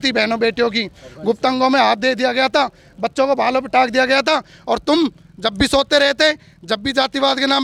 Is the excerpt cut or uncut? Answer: uncut